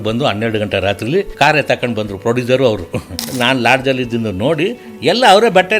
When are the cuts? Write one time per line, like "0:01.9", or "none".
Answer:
0:01.3
0:03.1